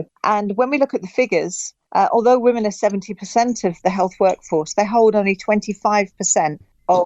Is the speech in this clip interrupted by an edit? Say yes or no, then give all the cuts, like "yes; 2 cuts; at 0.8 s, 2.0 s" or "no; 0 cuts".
no; 0 cuts